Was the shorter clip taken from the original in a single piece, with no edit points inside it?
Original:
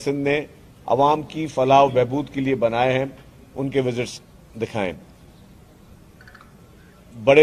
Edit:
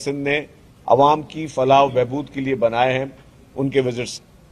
yes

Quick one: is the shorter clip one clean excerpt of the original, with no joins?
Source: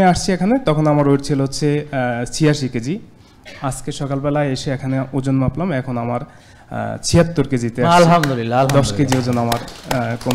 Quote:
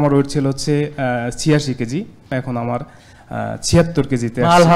no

